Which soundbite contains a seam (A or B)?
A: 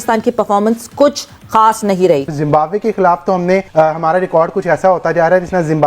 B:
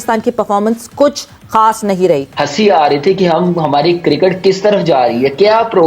A